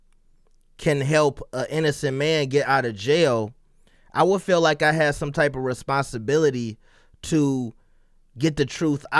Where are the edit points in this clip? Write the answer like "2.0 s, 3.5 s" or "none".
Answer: none